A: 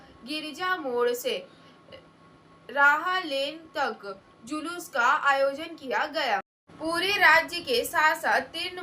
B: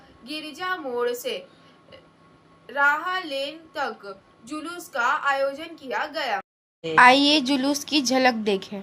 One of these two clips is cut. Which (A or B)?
A